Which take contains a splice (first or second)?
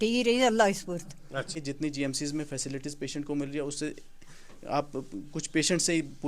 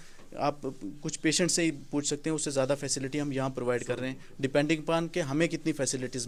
first